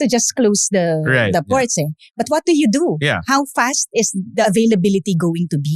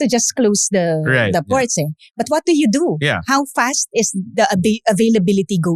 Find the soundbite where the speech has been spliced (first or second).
first